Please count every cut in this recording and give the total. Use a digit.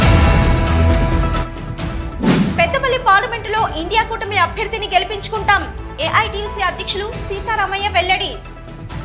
1